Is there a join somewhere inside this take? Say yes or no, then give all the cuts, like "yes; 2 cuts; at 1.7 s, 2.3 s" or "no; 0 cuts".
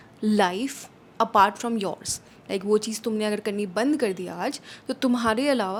no; 0 cuts